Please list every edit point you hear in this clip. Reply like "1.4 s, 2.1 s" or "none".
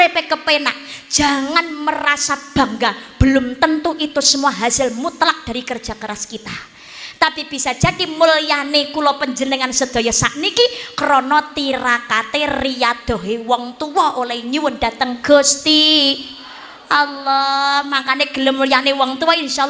none

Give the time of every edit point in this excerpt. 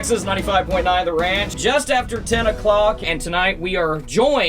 1.5 s, 3.0 s

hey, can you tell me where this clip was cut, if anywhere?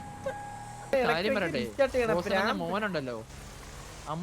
0.9 s

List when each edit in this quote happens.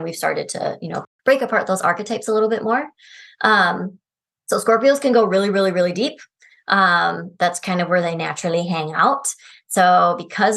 1.0 s

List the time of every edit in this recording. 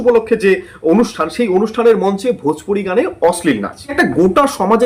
3.9 s

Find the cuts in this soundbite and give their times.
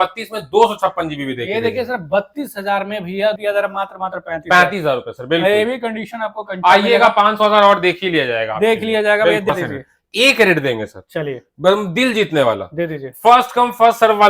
3.4 s, 9.5 s

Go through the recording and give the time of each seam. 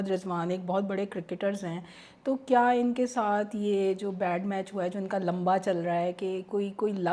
none

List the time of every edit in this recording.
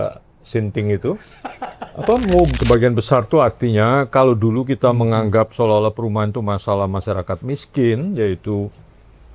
2.5 s

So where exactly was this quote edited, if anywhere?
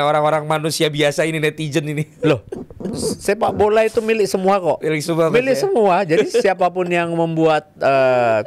none

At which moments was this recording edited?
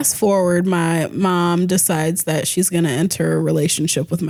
none

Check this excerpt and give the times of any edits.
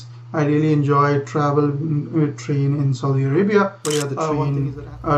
4.1 s

